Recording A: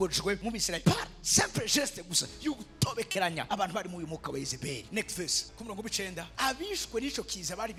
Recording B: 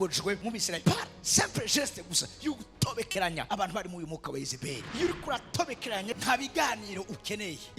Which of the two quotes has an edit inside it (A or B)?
B